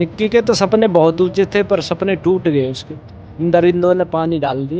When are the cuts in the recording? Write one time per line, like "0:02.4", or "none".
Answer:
0:03.2